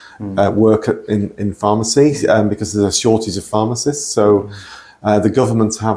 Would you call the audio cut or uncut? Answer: uncut